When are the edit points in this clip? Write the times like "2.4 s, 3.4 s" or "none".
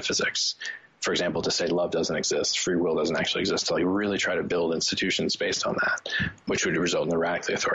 6.5 s